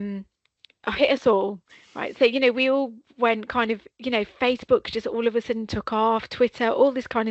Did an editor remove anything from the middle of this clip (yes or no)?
no